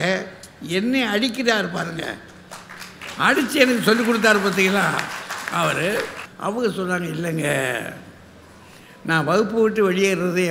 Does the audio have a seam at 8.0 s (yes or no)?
no